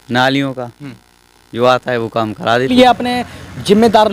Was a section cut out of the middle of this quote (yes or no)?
yes